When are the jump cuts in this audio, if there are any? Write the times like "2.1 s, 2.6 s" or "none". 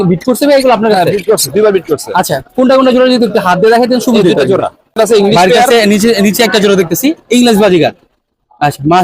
5.0 s